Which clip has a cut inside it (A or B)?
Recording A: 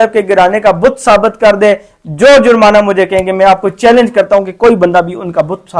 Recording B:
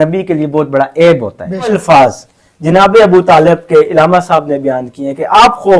B